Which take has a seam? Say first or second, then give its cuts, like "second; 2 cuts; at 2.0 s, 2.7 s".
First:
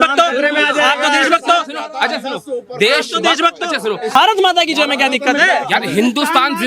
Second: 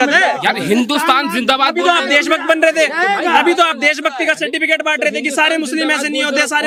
first; 1 cut; at 4.2 s